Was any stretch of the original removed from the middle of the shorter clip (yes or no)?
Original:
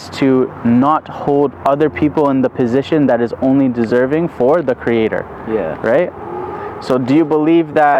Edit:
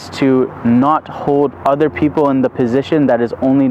no